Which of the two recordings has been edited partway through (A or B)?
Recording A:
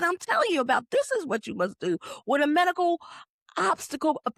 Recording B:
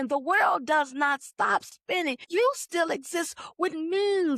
B